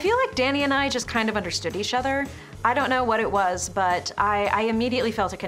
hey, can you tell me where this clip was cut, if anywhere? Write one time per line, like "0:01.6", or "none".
none